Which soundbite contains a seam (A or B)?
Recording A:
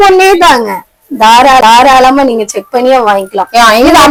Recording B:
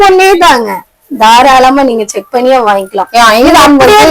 B